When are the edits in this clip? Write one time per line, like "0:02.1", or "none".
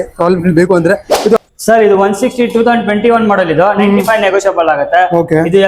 0:01.4